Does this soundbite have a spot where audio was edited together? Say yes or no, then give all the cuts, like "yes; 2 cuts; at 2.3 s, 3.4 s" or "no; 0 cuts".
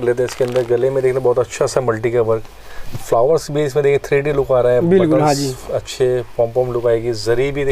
no; 0 cuts